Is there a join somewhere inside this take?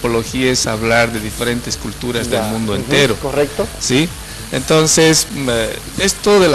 yes; 1 cut; at 2.1 s

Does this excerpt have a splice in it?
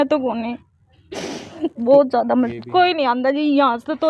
yes; 1 cut; at 2.6 s

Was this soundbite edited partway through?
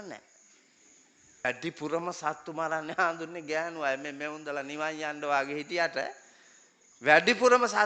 yes; 1 cut; at 1.4 s

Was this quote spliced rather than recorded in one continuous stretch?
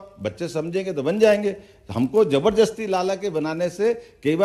no; 0 cuts

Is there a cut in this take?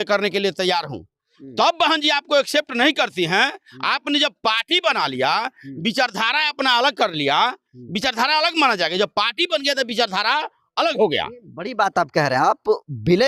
no; 0 cuts

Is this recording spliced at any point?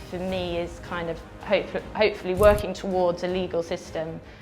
no; 0 cuts

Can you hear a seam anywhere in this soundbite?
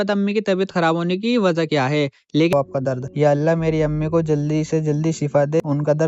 yes; 1 cut; at 2.5 s

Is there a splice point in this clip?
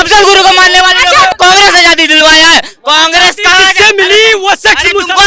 yes; 1 cut; at 1.3 s

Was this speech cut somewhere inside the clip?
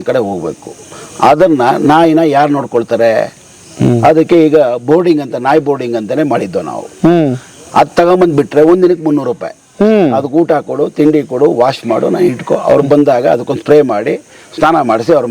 no; 0 cuts

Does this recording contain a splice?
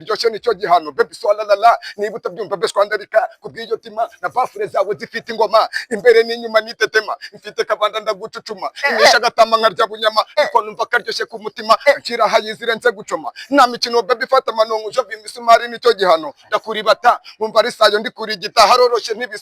no; 0 cuts

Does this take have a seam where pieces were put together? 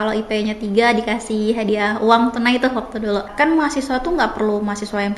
yes; 1 cut; at 3.3 s

